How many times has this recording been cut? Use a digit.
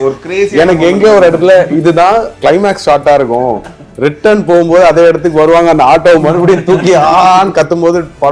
1